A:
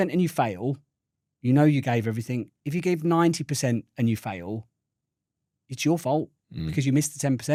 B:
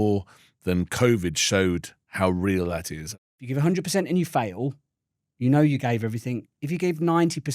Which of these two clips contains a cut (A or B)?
B